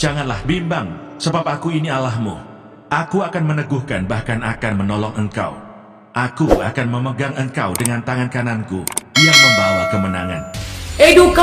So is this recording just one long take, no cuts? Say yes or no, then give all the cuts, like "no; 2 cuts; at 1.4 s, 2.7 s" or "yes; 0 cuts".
yes; 0 cuts